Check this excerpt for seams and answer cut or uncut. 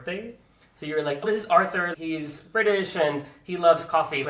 cut